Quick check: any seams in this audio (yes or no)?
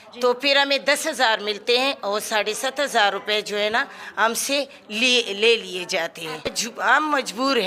yes